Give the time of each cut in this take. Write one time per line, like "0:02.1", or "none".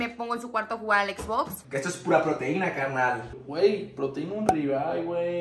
0:01.6